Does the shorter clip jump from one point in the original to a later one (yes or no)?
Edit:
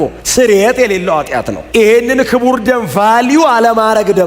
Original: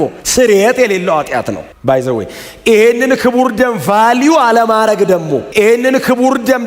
yes